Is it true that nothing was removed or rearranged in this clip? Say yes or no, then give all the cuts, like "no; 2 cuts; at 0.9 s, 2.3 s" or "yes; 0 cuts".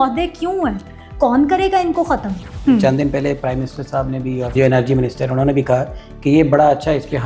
no; 2 cuts; at 2.5 s, 4.5 s